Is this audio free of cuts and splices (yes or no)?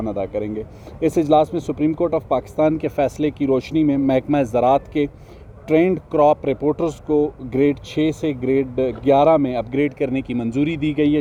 yes